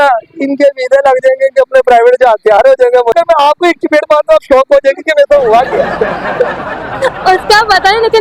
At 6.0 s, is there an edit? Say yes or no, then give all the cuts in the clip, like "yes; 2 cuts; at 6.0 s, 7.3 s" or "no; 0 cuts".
no; 1 cut; at 3.1 s